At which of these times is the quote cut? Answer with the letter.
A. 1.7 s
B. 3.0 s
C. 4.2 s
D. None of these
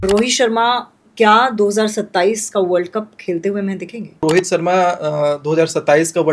C